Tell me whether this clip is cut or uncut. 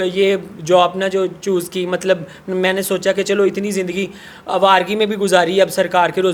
uncut